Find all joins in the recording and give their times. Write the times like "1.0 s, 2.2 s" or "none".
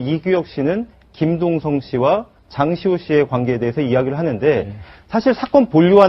2.3 s